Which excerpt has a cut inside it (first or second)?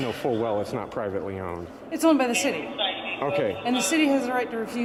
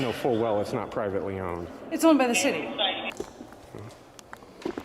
second